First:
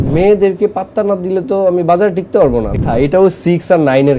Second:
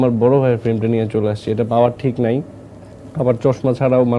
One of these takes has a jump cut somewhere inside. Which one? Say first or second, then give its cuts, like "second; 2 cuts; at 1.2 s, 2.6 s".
first; 1 cut; at 2.7 s